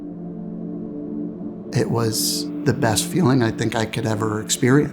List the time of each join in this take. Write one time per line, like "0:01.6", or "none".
0:01.7